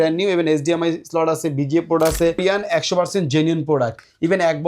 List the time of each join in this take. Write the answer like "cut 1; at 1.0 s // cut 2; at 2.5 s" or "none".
cut 1; at 2.4 s

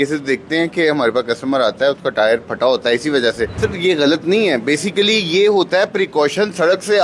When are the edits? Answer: cut 1; at 3.5 s

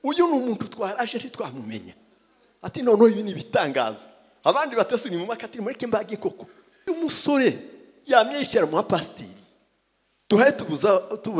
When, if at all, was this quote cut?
cut 1; at 6.9 s

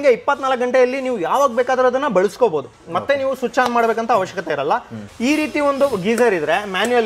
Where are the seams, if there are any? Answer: cut 1; at 5.0 s

